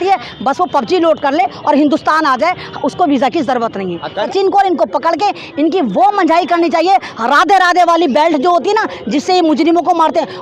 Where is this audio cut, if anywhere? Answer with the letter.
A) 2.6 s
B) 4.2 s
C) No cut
B